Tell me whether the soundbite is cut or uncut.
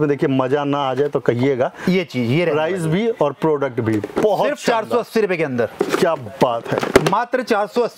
uncut